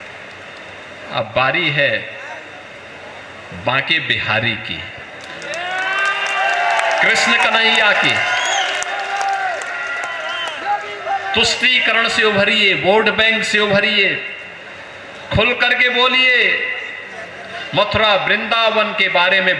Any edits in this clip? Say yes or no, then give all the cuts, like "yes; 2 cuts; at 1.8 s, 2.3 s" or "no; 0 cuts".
no; 0 cuts